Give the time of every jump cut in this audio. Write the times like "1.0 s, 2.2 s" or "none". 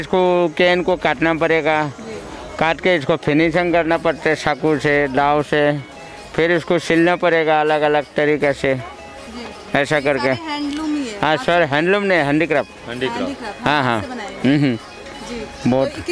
none